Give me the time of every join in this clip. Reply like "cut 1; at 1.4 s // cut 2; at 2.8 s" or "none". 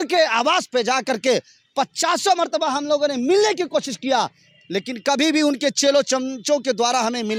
none